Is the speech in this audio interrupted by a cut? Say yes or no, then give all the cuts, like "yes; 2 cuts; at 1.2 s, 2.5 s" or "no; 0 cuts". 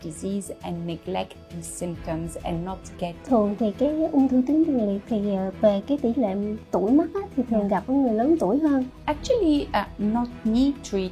yes; 2 cuts; at 3.3 s, 8.9 s